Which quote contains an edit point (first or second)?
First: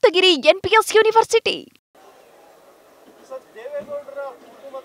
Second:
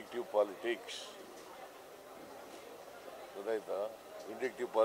first